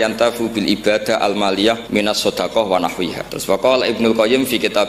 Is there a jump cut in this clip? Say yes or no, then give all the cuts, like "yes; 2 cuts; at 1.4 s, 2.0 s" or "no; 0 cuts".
yes; 2 cuts; at 1.8 s, 3.3 s